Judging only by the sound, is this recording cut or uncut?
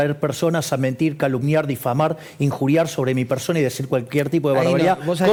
uncut